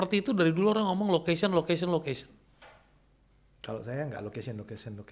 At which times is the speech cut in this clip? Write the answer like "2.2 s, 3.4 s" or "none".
none